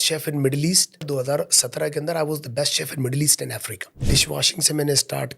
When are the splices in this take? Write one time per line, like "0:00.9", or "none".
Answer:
0:01.1
0:04.1